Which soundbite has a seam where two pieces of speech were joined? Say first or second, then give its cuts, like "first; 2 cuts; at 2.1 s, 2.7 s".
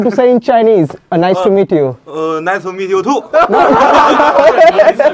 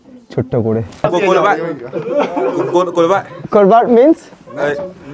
second; 1 cut; at 1.0 s